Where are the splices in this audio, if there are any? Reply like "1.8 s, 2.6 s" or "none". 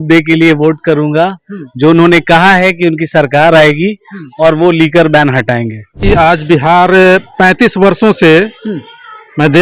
6.0 s